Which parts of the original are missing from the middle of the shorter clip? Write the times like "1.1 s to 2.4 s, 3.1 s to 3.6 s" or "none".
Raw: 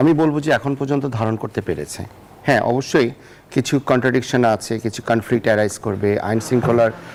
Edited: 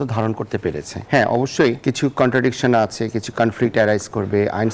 2.0 s to 2.3 s, 3.1 s to 3.5 s

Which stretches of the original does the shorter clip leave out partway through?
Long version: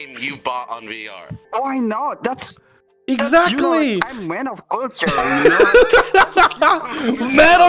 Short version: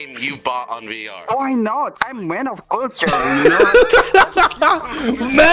1.1 s to 1.4 s, 2.2 s to 4.0 s

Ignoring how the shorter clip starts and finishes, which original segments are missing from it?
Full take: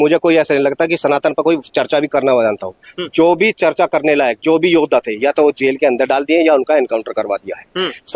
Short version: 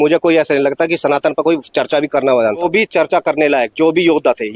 2.6 s to 3.3 s

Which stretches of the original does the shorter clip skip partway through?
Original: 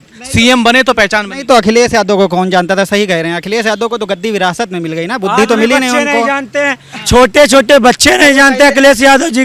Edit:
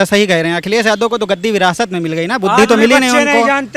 none

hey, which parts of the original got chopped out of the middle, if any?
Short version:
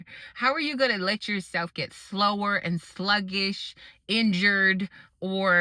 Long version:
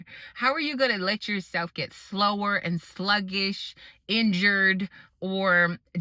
none

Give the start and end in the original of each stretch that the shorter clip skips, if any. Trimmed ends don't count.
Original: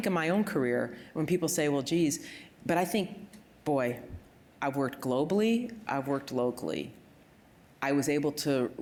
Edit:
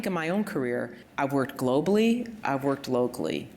1.0 s to 4.4 s

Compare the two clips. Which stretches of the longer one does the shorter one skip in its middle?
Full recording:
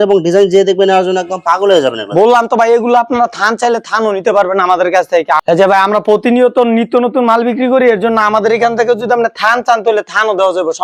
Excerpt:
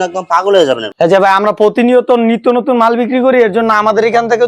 2.1 s to 5.4 s

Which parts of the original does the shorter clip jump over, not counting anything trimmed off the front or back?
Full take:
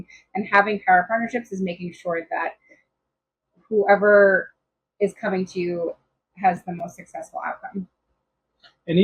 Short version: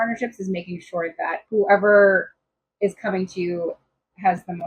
2.6 s to 3.6 s

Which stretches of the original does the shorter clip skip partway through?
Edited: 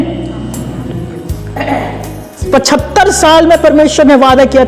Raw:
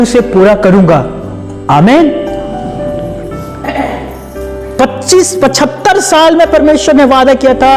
4.5 s to 5.3 s

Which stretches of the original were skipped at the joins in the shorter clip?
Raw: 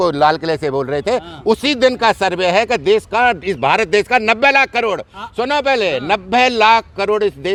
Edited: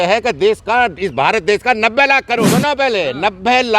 4.9 s to 5.3 s

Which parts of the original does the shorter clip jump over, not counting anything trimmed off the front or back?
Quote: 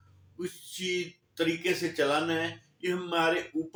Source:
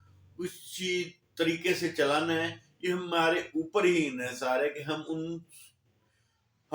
none

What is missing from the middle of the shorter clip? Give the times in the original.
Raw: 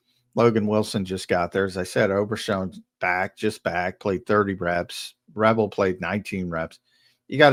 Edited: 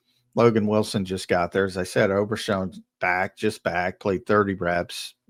none

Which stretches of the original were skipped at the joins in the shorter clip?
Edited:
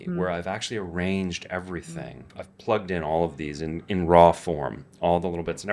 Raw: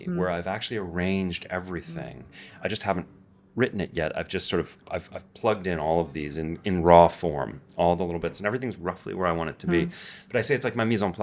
2.4 s to 5.2 s

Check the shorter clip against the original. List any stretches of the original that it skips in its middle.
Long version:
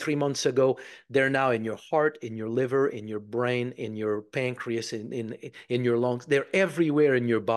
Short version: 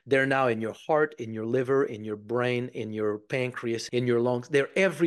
4.9 s to 5.6 s

